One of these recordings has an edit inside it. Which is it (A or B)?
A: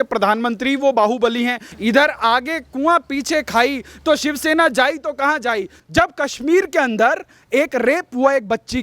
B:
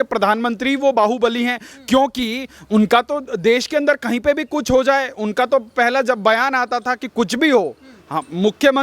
A